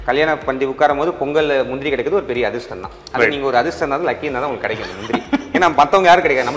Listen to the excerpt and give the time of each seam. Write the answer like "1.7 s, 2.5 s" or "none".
none